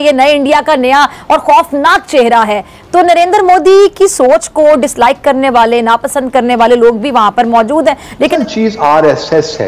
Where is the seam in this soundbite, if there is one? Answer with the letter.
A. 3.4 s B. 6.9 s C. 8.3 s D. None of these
C